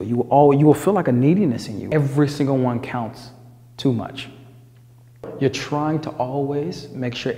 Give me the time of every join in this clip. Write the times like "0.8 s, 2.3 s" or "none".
1.7 s, 5.3 s